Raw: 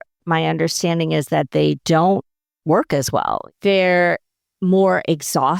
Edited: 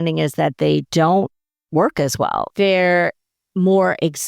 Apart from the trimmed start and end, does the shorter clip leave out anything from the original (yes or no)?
yes